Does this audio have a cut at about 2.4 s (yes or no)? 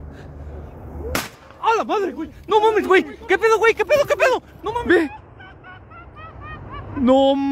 no